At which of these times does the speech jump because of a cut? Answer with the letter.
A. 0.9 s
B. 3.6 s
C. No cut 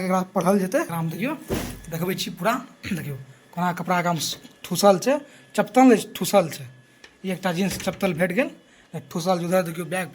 A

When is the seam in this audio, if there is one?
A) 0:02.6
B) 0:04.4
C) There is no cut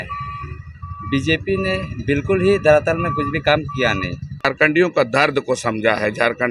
B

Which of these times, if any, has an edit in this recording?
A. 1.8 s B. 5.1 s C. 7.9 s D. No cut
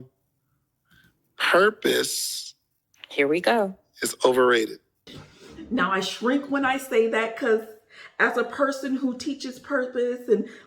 B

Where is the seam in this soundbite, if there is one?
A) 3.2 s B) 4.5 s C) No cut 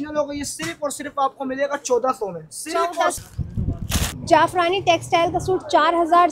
A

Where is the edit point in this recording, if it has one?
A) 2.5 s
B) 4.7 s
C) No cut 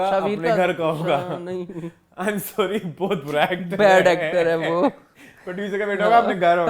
C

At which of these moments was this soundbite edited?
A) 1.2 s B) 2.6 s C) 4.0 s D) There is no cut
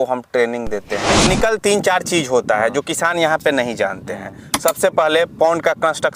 A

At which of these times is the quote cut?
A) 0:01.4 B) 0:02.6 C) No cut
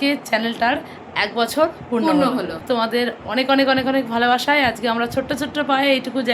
B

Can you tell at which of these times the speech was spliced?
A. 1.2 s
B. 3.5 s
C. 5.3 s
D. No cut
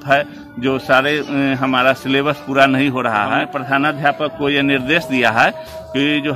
B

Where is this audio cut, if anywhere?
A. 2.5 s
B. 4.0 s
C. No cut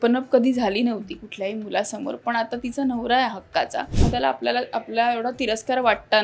B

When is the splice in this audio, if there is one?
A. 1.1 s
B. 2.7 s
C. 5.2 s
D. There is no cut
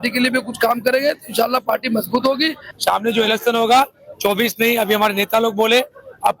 B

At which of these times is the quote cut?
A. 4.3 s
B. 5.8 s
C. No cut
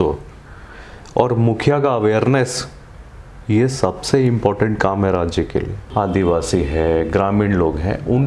B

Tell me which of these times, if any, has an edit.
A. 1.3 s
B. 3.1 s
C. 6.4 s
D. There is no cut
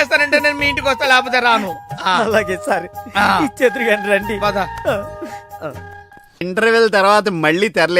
C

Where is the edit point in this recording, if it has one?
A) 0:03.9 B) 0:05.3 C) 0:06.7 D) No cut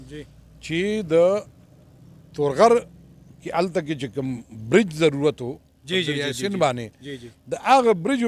D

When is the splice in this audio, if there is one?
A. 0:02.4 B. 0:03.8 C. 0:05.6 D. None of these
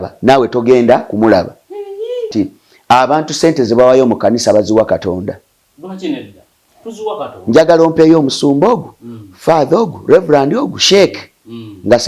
A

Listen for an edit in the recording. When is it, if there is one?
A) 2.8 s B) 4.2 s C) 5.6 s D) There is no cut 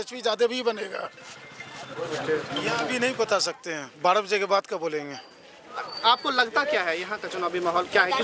A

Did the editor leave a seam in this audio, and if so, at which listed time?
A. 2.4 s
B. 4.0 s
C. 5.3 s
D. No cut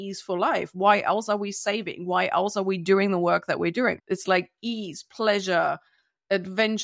B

